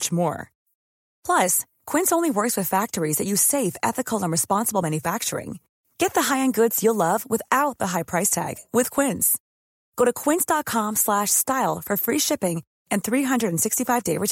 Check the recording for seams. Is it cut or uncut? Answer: uncut